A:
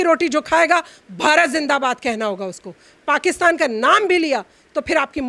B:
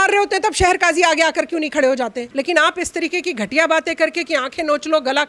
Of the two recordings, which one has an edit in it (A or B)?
B